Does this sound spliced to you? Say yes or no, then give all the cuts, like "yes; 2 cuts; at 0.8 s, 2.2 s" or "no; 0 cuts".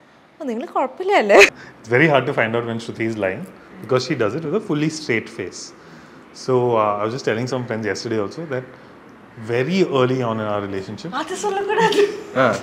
yes; 1 cut; at 1.6 s